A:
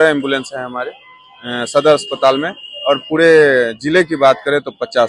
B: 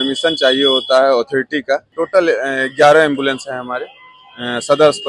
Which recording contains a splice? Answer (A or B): B